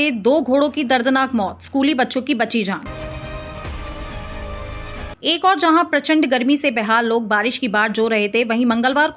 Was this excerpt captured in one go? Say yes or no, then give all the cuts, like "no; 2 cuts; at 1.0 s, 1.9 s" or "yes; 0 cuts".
yes; 0 cuts